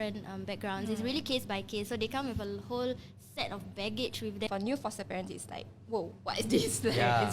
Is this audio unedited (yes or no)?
no